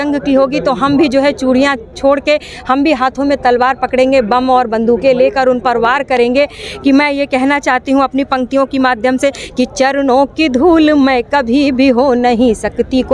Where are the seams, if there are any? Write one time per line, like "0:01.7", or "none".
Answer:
none

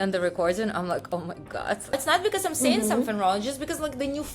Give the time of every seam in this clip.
0:01.9

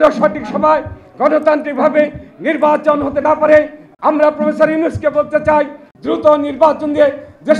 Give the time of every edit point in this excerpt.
0:03.8
0:05.9

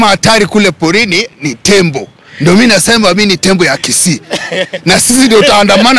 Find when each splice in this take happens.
none

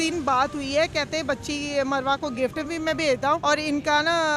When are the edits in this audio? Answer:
0:03.4

